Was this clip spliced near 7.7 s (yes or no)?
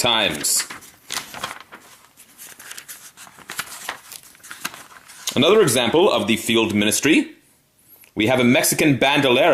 no